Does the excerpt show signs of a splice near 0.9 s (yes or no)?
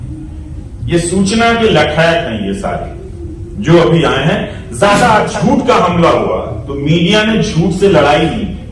no